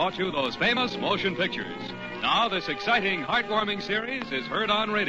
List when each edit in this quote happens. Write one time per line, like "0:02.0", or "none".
0:02.7